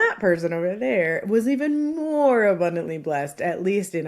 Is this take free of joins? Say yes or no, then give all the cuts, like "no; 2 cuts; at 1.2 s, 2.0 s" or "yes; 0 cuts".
yes; 0 cuts